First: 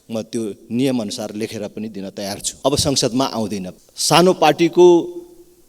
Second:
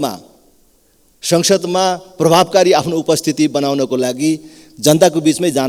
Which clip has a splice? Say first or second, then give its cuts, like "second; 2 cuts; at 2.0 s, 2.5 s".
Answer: first; 2 cuts; at 2.4 s, 3.7 s